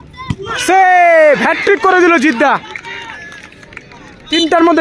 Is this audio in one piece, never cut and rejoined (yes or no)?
no